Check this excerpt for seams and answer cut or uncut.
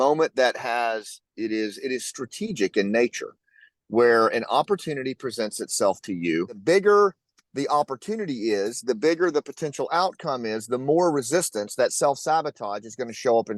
cut